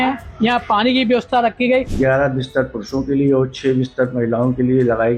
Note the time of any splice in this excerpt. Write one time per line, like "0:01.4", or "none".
0:01.9